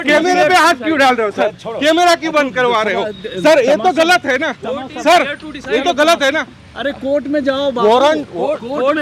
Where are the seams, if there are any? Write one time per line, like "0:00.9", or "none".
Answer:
none